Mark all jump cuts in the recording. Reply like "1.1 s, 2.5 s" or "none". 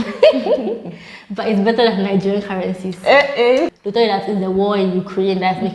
3.7 s